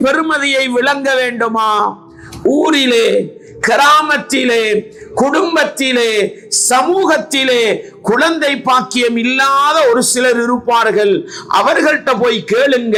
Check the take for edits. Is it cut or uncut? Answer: uncut